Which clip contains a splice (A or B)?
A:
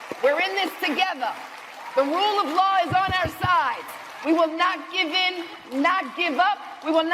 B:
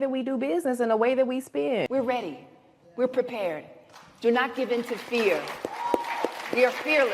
B